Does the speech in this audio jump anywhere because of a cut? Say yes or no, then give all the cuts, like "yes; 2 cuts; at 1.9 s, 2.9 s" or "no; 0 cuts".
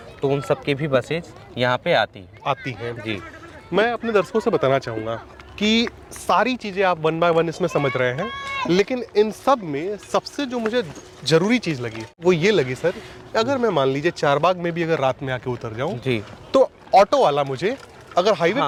no; 0 cuts